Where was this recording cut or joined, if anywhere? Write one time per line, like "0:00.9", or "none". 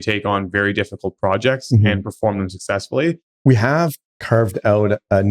0:03.3
0:04.1